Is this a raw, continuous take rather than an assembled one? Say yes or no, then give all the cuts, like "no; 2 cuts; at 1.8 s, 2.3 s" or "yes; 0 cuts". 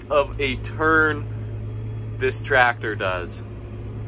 yes; 0 cuts